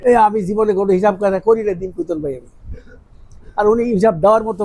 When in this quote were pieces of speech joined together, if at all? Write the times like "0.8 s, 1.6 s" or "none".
none